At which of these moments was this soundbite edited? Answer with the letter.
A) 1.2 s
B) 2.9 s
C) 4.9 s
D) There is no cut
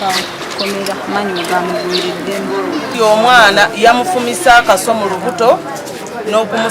B